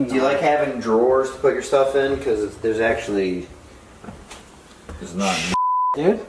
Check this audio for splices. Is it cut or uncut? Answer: uncut